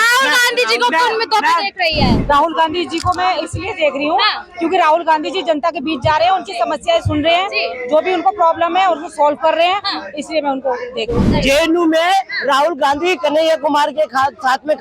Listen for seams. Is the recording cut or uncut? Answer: cut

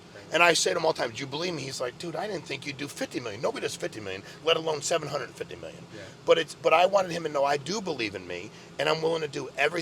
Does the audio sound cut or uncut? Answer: uncut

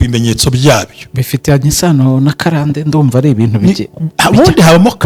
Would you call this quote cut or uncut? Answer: uncut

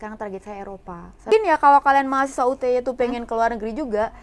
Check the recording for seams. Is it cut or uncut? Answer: cut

